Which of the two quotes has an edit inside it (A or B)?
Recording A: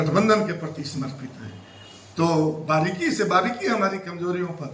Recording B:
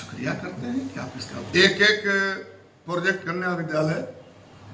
B